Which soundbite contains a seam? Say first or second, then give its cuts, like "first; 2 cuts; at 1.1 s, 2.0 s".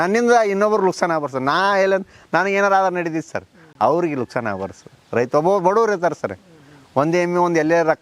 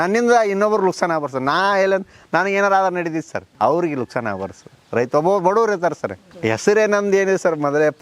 second; 2 cuts; at 3.4 s, 6.3 s